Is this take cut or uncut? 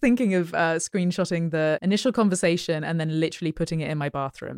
cut